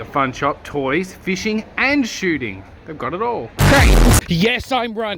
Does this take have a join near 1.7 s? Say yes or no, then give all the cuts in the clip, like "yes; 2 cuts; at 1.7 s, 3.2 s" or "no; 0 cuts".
no; 2 cuts; at 3.5 s, 4.2 s